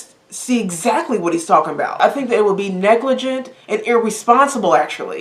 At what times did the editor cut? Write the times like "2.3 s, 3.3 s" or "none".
2.0 s